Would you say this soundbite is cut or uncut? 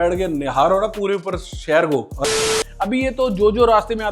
cut